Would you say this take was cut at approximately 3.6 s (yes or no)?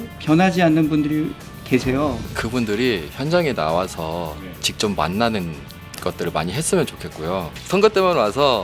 no